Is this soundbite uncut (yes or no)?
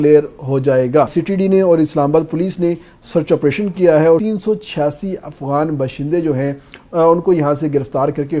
no